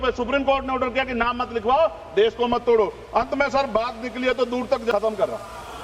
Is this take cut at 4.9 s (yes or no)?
yes